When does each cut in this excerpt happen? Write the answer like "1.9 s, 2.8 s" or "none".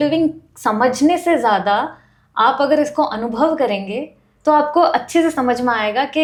none